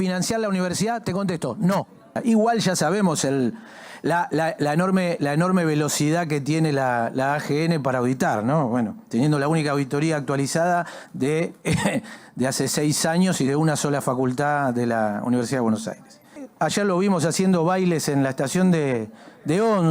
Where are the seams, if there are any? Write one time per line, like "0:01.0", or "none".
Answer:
0:02.2
0:16.4